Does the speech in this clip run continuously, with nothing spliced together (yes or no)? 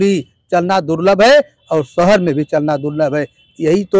yes